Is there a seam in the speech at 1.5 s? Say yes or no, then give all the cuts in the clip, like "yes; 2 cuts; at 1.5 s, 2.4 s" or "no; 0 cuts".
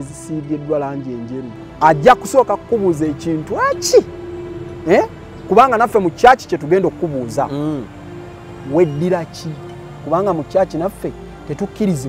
yes; 1 cut; at 1.5 s